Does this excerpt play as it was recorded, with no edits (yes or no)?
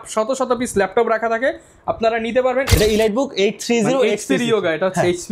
no